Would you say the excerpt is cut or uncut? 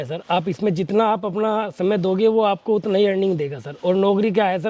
uncut